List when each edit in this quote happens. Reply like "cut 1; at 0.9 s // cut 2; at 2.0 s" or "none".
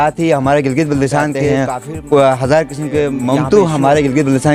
cut 1; at 1.5 s // cut 2; at 3.2 s